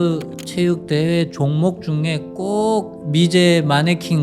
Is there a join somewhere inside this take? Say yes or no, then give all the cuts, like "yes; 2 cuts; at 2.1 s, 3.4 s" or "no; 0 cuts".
yes; 1 cut; at 2.9 s